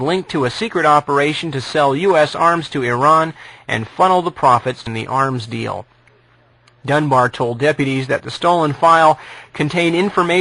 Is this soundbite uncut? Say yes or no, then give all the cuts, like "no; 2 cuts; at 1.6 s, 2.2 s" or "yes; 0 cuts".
yes; 0 cuts